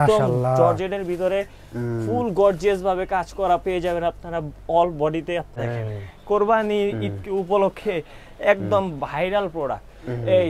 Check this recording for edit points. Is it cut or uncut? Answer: cut